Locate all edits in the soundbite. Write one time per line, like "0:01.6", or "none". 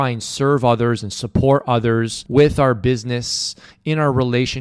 0:02.2